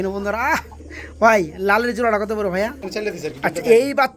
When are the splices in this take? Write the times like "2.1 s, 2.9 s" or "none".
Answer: 2.8 s